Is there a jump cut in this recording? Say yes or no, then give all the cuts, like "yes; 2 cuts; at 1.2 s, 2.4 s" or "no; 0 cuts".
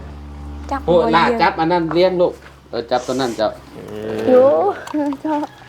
no; 0 cuts